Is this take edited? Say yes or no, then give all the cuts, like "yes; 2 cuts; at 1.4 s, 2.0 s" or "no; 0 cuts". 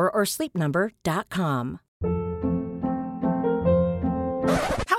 yes; 1 cut; at 1.9 s